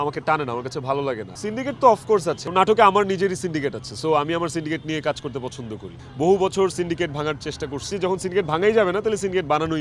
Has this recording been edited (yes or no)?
yes